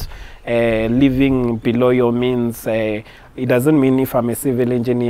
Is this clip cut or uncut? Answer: uncut